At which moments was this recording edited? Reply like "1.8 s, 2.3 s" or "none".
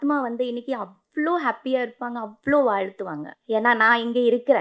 3.3 s